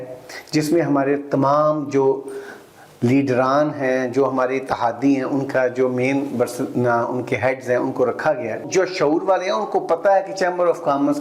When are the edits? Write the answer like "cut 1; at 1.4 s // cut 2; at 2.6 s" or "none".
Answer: cut 1; at 8.6 s